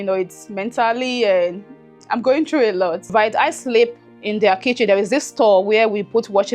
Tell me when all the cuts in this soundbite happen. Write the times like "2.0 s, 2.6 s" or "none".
3.1 s